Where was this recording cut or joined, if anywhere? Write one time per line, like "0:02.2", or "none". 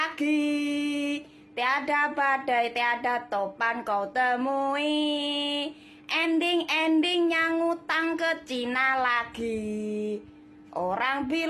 none